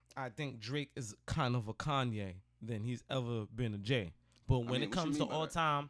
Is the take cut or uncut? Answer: uncut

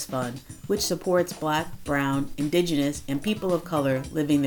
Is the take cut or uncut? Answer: uncut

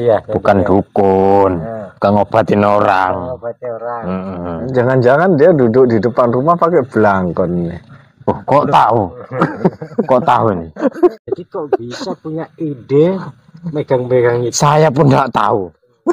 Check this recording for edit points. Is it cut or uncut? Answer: cut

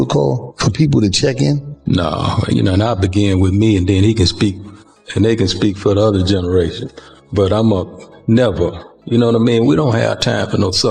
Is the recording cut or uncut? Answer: uncut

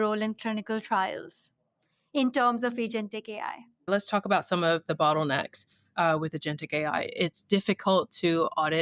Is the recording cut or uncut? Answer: cut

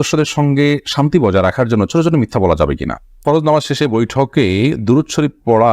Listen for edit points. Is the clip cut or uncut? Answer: cut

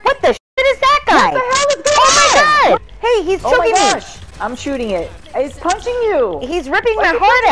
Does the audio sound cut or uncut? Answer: cut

